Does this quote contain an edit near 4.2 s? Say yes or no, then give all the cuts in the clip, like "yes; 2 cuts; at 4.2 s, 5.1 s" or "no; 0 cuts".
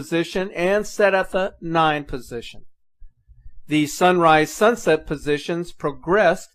yes; 1 cut; at 4.2 s